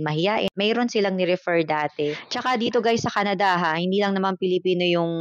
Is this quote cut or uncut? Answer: cut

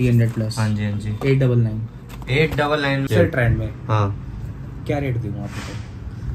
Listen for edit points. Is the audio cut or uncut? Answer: cut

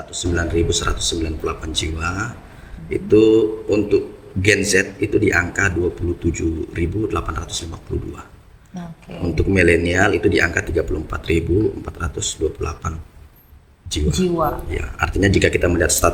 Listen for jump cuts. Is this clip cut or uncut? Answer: uncut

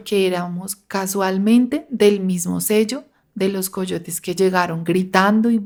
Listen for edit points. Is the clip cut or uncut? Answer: uncut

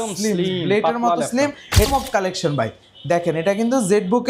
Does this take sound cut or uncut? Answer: cut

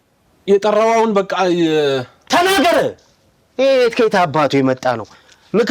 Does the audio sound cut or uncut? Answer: uncut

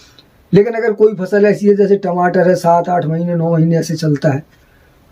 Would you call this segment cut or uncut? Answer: uncut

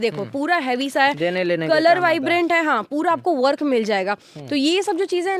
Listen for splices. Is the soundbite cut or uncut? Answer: uncut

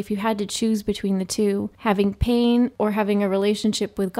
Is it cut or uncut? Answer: cut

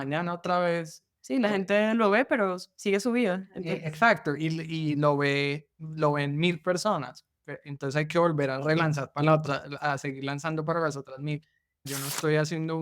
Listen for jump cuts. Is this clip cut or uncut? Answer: cut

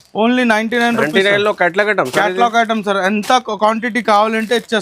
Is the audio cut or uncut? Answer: uncut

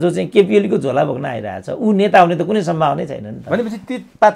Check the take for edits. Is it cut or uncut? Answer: uncut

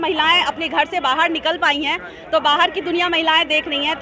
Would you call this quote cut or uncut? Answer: uncut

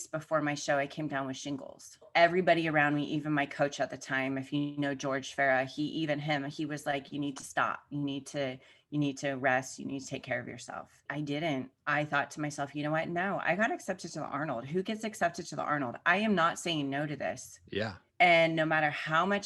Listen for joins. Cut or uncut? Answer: cut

